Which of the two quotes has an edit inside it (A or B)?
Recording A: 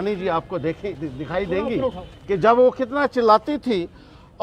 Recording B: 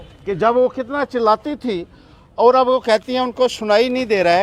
A